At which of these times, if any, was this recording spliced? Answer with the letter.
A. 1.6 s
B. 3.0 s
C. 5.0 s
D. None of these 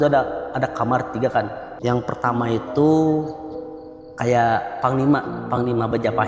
A